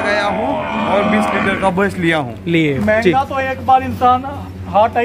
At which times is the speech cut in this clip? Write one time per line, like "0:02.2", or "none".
0:02.8